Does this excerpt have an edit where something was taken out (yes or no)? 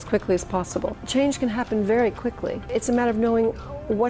yes